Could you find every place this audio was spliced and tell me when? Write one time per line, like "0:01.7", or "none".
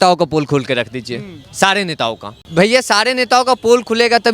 0:02.3